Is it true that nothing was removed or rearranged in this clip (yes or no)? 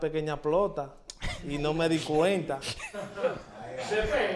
yes